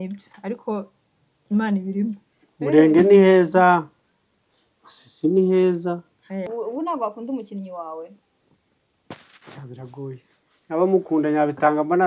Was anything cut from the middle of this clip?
yes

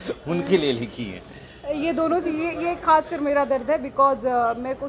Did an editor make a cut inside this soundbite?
no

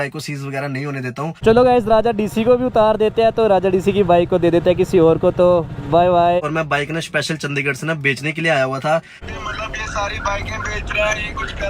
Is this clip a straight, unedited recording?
no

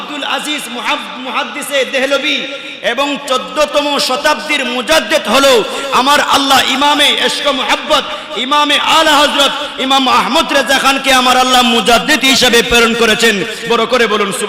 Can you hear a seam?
no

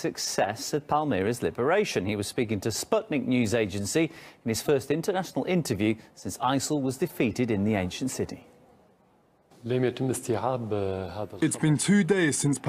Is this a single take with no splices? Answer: yes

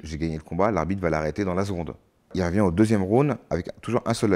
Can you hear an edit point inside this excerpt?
yes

